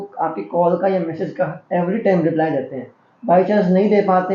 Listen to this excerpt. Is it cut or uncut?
uncut